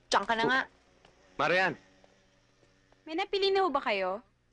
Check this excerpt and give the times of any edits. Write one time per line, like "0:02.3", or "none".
0:02.9